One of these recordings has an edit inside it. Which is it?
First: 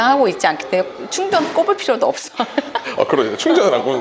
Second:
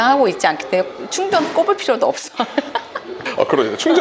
first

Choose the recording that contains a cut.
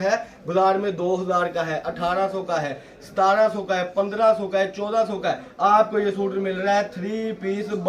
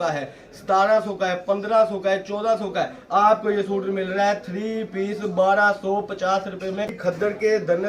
second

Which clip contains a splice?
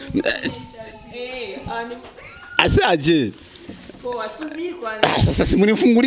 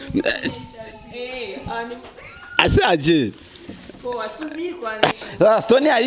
second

